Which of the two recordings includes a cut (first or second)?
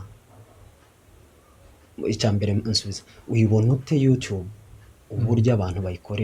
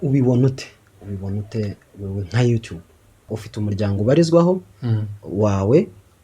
second